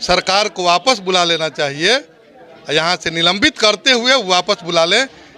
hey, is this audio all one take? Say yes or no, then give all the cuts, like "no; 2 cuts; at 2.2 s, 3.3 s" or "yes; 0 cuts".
yes; 0 cuts